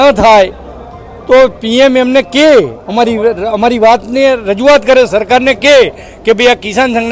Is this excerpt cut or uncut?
uncut